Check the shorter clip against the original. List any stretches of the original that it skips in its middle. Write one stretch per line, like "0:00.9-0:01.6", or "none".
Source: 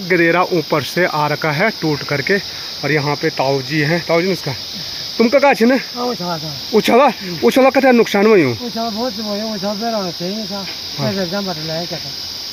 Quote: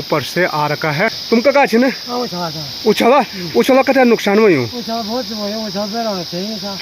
0:01.8-0:05.0